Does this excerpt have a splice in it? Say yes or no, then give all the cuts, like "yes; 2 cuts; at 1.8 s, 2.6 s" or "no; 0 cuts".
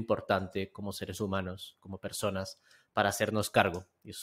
no; 0 cuts